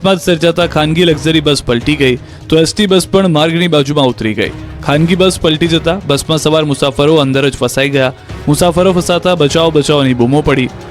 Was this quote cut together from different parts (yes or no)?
yes